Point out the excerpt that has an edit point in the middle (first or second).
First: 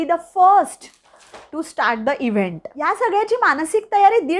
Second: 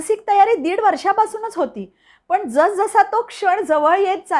first